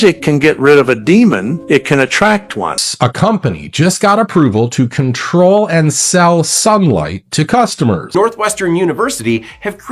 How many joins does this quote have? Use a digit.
2